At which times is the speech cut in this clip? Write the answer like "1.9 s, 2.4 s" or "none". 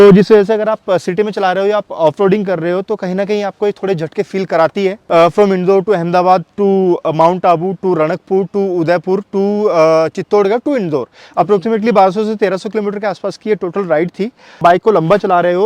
5.0 s, 14.6 s